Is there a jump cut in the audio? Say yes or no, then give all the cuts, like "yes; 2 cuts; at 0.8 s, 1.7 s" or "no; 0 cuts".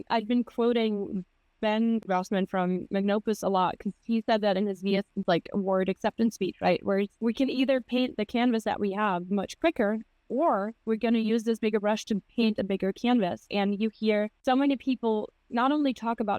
yes; 4 cuts; at 2.0 s, 5.2 s, 7.1 s, 14.3 s